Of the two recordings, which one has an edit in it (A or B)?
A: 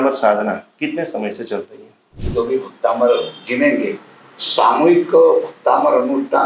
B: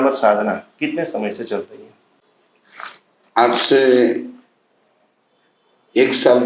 A